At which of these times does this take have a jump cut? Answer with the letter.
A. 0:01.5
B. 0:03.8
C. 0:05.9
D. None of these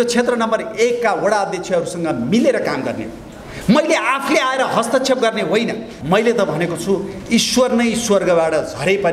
C